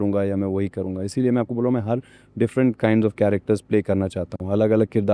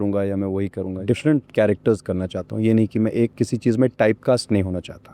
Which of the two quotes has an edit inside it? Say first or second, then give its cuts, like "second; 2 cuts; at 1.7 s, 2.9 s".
second; 2 cuts; at 1.0 s, 3.3 s